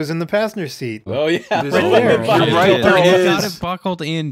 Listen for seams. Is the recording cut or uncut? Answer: cut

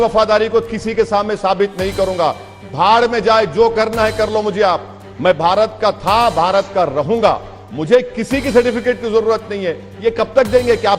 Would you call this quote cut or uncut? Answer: uncut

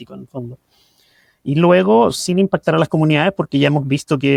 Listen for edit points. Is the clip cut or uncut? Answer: uncut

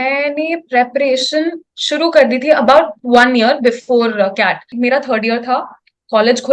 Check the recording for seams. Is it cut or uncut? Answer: cut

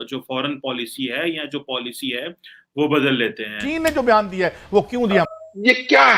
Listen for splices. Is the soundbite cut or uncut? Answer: cut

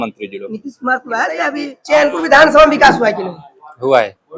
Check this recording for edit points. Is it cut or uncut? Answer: cut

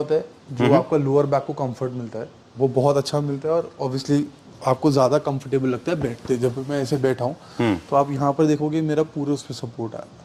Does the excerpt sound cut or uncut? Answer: uncut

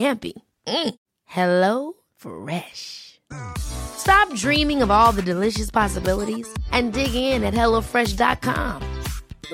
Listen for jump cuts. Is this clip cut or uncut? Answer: uncut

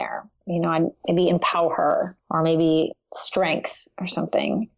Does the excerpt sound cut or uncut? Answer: uncut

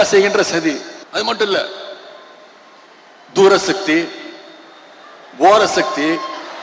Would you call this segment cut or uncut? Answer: cut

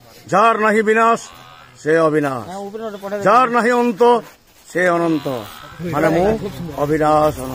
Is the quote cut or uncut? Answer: uncut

